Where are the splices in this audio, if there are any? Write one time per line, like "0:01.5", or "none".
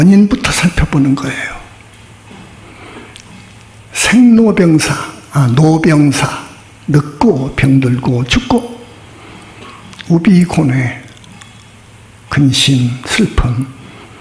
0:01.9